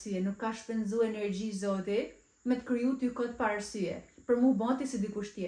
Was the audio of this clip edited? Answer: no; 0 cuts

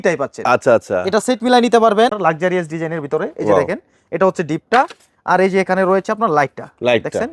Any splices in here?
yes; 1 cut; at 2.2 s

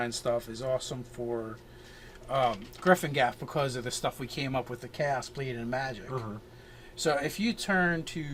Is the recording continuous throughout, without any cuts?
yes; 0 cuts

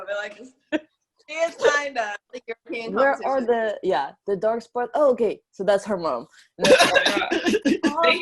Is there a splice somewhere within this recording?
yes; 1 cut; at 2.4 s

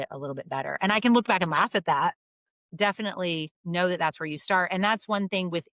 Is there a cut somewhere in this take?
no; 0 cuts

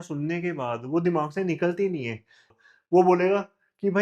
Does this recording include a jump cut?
yes; 1 cut; at 2.5 s

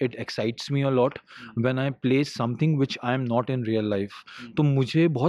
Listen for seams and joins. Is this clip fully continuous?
yes; 0 cuts

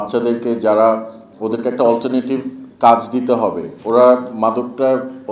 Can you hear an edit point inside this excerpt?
no; 0 cuts

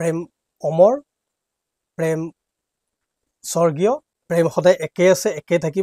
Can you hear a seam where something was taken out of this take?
yes; 1 cut; at 4.1 s

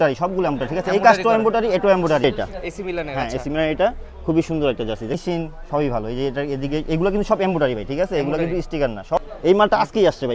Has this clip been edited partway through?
yes; 3 cuts; at 2.2 s, 5.2 s, 9.2 s

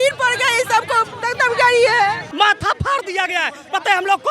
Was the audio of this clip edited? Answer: yes; 1 cut; at 2.3 s

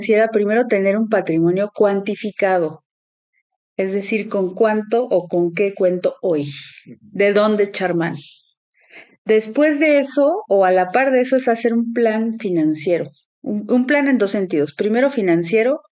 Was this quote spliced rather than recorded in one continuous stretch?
no; 0 cuts

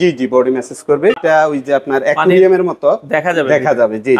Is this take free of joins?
no; 1 cut; at 1.2 s

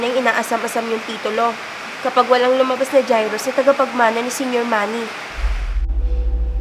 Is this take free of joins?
yes; 0 cuts

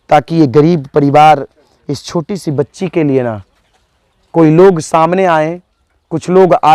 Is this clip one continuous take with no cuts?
yes; 0 cuts

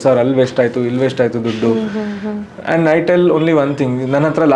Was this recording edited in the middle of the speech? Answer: no; 0 cuts

